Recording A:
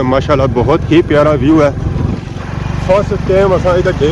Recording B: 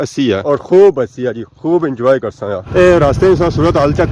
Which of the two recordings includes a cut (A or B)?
B